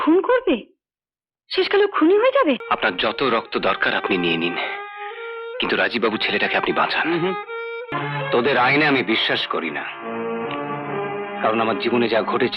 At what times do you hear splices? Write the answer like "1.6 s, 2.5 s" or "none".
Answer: 2.6 s, 7.9 s